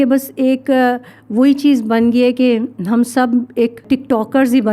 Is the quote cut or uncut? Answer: cut